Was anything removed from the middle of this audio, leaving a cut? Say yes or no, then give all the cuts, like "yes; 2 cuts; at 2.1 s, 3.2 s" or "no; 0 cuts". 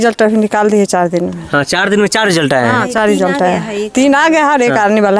no; 0 cuts